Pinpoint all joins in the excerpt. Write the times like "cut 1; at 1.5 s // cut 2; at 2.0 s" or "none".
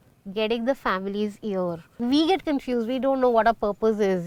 cut 1; at 2.0 s

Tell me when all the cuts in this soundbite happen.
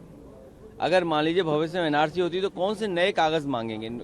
cut 1; at 1.7 s

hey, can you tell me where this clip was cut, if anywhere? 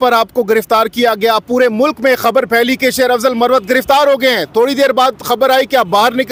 none

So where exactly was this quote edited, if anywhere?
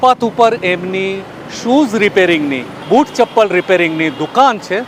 none

